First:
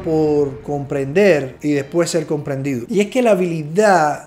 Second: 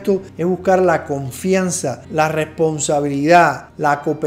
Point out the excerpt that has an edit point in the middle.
first; 1 cut; at 2.8 s

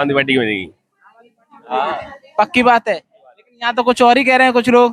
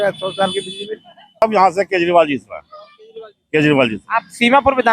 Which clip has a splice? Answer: second; 1 cut; at 1.4 s

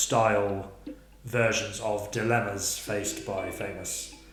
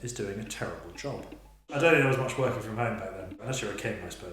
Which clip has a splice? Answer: second; 2 cuts; at 1.7 s, 3.4 s

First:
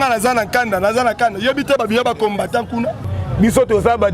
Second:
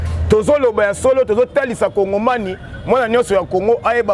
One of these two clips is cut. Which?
first; 1 cut; at 3.2 s

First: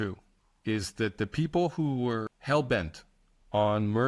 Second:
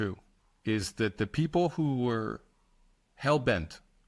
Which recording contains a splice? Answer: first; 1 cut; at 2.3 s

